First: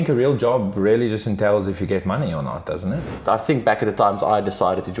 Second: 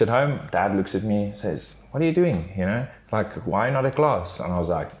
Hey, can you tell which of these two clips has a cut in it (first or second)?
first